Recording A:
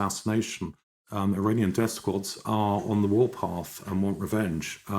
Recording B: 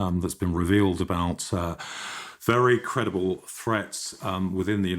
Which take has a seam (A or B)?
A